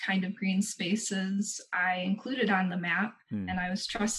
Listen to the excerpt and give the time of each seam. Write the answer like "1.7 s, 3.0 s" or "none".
none